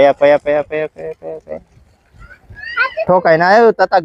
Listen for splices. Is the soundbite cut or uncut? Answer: uncut